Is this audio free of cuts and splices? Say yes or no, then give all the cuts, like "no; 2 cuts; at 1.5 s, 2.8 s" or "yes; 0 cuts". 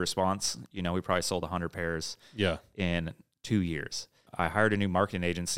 no; 1 cut; at 4.3 s